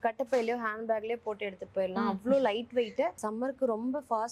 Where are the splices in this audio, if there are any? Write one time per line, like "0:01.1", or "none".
0:03.2